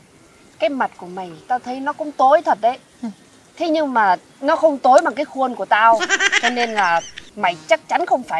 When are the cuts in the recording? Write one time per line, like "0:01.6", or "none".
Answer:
none